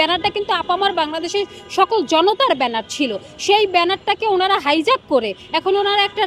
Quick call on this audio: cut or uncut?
uncut